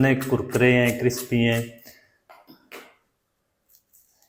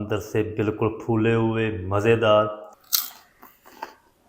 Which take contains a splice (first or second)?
second